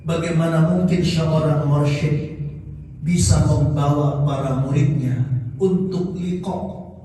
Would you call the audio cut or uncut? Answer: uncut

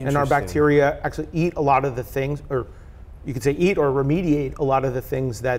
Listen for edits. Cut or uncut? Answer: uncut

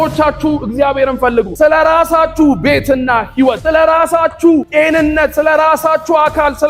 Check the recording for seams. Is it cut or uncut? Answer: cut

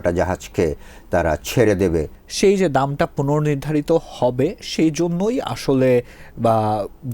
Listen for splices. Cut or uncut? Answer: cut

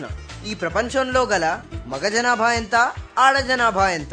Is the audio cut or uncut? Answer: uncut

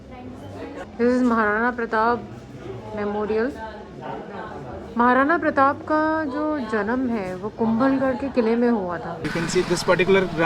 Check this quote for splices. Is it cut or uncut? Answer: cut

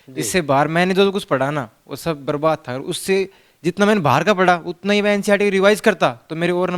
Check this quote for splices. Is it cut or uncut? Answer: uncut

